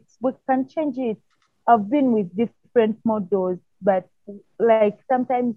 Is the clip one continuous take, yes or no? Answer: yes